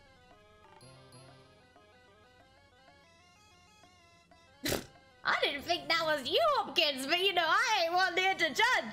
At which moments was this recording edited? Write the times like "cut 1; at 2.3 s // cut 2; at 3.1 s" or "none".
none